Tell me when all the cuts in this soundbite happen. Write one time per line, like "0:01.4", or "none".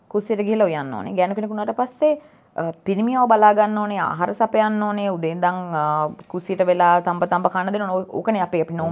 none